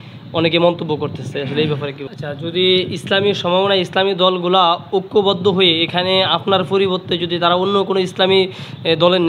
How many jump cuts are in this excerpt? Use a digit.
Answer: 1